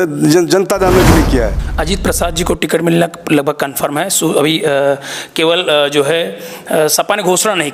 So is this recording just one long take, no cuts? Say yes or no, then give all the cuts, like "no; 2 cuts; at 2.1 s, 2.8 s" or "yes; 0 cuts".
no; 1 cut; at 1.6 s